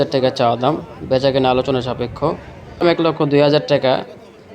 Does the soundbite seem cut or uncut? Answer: cut